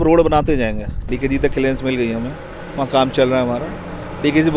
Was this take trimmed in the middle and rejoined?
yes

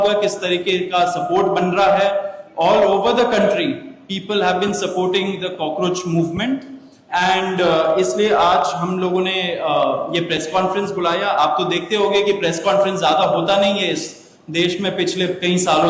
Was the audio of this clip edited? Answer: no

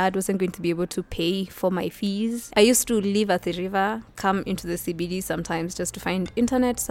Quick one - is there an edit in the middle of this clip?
yes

